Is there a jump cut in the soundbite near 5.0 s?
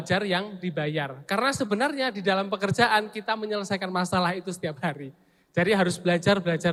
no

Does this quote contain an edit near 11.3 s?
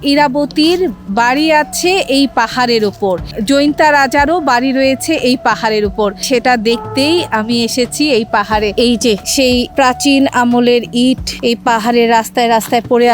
yes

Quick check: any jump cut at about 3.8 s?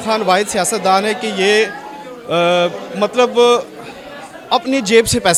no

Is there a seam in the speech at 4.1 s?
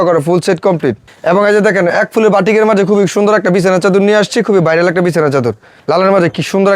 no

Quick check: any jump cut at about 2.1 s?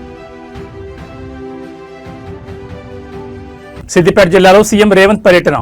no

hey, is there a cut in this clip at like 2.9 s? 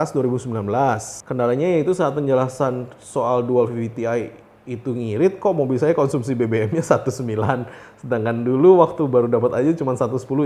no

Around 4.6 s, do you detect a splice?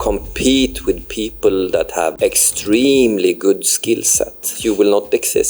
yes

